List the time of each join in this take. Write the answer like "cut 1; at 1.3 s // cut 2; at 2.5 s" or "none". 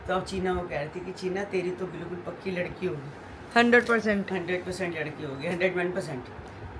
none